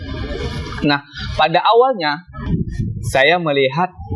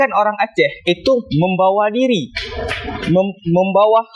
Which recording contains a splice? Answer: first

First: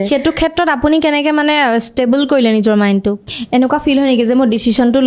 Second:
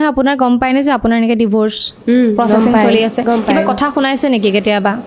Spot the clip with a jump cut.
first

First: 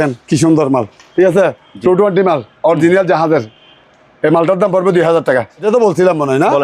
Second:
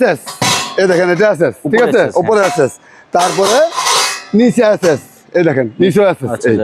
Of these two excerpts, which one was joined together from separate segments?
first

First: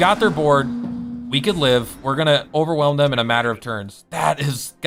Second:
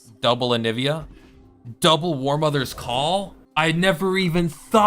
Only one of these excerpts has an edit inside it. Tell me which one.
second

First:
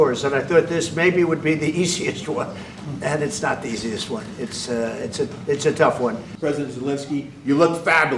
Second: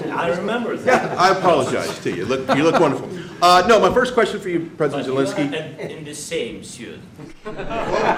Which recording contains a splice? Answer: first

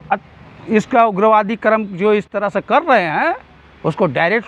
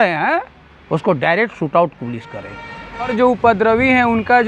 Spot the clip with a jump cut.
second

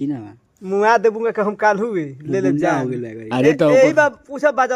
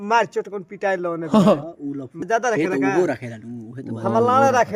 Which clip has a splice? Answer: second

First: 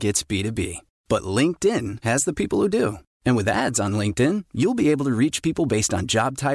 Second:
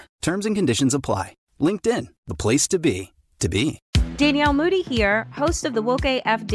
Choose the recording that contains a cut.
second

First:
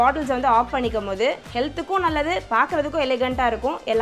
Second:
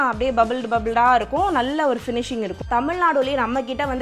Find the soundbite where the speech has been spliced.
second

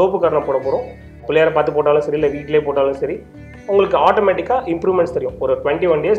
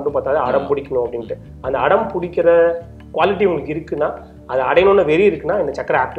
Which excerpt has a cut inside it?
first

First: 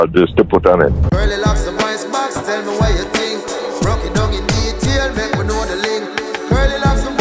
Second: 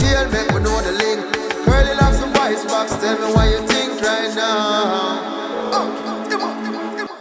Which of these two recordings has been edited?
first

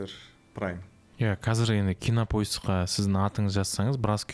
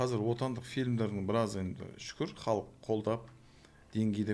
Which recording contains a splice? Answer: first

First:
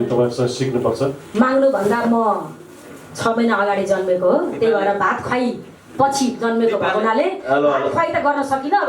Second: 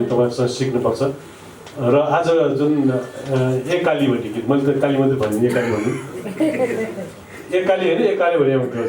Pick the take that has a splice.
first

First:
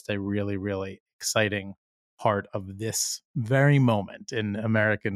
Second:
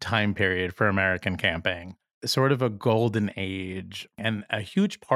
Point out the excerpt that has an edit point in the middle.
second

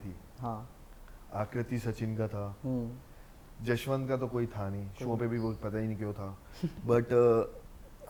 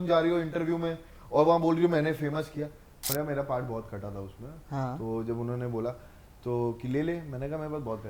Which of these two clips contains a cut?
second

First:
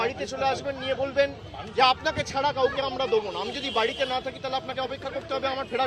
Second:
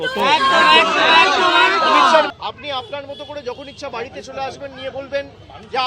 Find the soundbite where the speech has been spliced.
second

